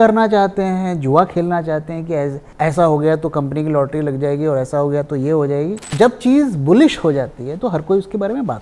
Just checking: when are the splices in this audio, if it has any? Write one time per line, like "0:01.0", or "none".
0:02.4
0:05.8